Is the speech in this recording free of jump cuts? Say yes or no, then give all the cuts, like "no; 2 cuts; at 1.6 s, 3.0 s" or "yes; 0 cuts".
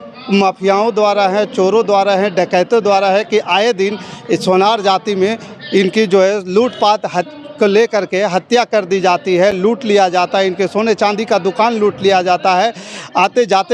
yes; 0 cuts